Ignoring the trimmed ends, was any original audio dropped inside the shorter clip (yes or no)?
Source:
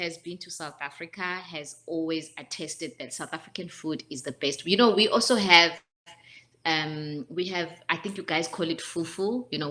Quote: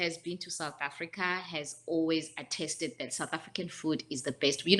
no